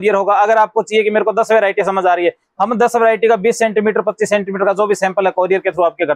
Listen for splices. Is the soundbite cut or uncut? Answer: uncut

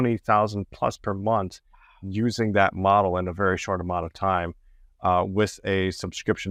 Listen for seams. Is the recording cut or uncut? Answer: uncut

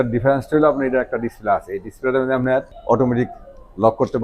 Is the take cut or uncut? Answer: cut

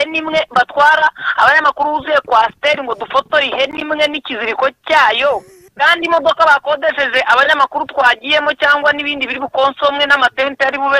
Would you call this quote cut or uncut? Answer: cut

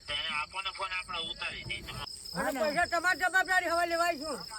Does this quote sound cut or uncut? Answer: cut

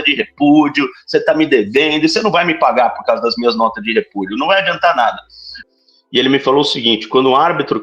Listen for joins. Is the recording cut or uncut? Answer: cut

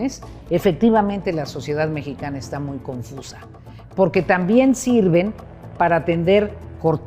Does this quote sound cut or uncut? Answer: uncut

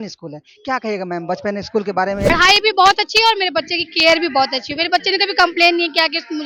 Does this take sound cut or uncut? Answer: cut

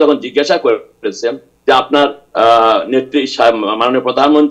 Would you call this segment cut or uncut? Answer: uncut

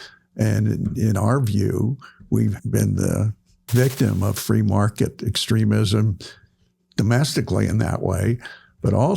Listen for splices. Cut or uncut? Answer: cut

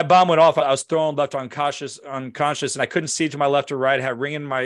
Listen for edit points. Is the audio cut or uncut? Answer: uncut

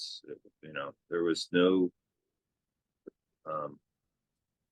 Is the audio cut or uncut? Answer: uncut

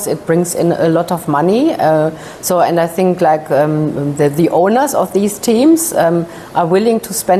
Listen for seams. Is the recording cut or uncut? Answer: uncut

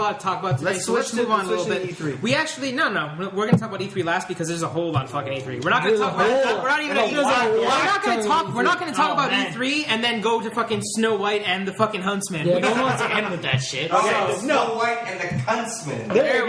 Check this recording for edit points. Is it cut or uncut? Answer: uncut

